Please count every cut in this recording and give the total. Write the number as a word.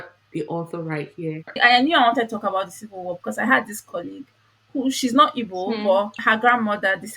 one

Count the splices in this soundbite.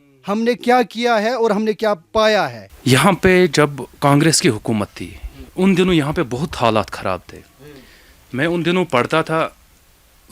one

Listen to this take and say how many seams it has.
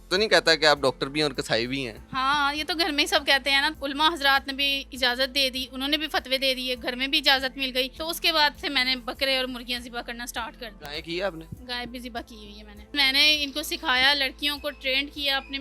five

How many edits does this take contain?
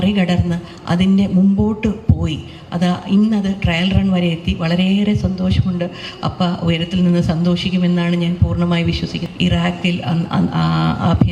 one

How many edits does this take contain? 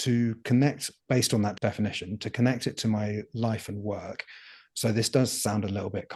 one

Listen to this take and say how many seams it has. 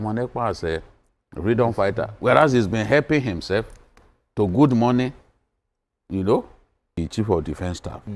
one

